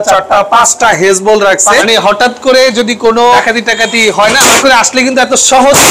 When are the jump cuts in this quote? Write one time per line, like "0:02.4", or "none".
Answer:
0:01.8
0:03.4
0:04.6